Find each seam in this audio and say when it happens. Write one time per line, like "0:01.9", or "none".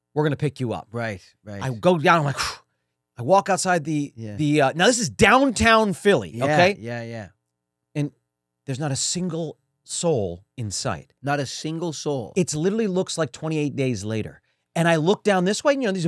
none